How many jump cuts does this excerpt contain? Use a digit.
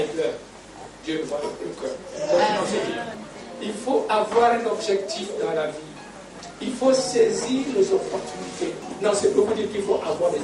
2